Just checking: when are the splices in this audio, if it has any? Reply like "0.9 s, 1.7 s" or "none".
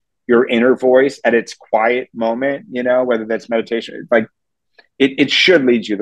none